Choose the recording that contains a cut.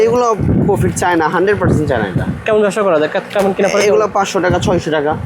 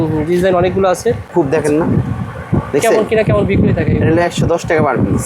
second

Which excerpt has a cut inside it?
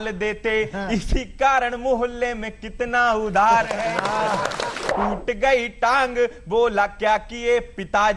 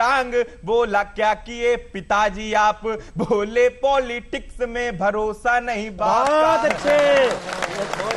first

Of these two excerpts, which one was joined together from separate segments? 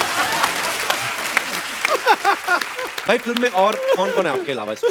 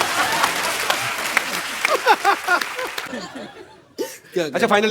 second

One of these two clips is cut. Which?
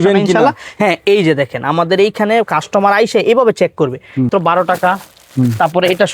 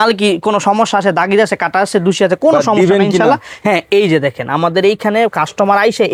first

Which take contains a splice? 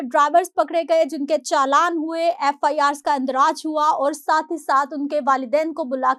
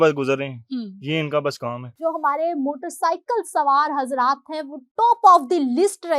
second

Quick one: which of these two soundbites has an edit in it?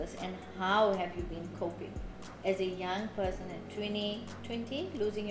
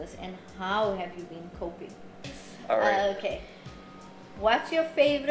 second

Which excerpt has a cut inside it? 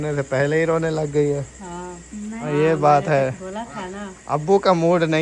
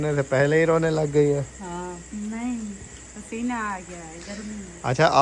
first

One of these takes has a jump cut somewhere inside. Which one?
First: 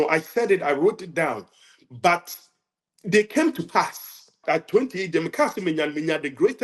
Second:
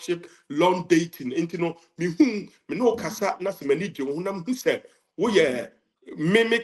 first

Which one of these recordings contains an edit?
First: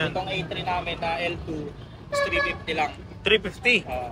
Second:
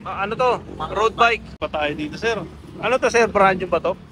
second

